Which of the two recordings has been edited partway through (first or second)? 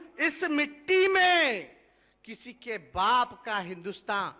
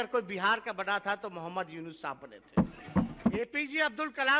second